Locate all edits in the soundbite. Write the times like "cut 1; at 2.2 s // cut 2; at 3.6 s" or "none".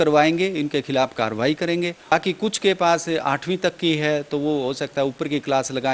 cut 1; at 2.0 s